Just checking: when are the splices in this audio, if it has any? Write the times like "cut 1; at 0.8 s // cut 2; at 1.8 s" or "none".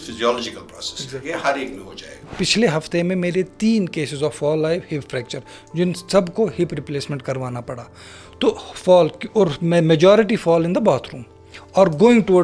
cut 1; at 2.2 s